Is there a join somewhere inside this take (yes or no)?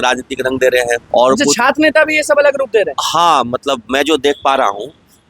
yes